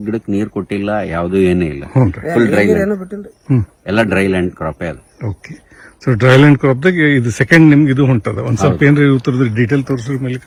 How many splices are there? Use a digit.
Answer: 0